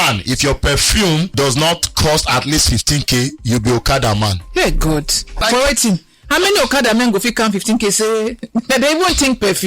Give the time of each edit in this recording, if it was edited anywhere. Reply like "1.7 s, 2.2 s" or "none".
1.3 s, 5.4 s